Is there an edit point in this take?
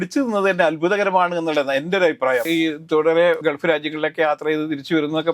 yes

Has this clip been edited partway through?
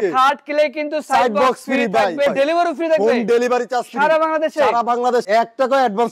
yes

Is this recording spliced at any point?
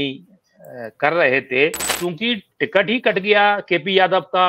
yes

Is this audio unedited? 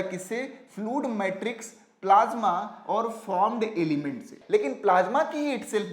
no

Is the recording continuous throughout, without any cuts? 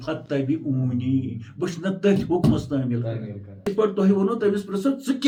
yes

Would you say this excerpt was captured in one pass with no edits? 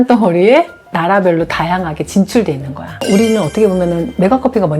no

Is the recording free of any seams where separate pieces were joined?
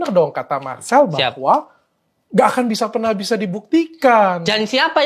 yes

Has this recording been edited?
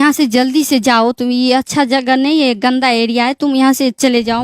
no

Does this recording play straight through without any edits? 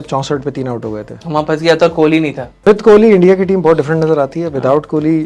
no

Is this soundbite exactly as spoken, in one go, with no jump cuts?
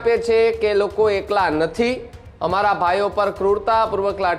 yes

